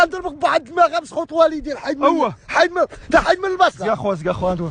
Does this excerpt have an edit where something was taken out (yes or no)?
yes